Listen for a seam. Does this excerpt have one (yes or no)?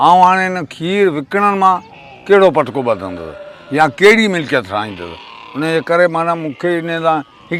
no